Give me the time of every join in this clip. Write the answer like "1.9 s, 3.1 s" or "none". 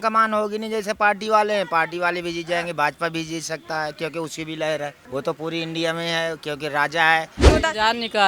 5.0 s, 7.5 s